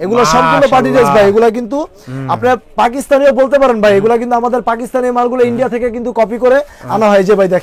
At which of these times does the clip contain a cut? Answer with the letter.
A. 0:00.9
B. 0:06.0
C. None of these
C